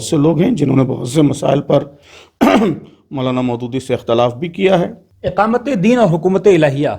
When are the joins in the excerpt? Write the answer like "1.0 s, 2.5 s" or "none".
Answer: 5.1 s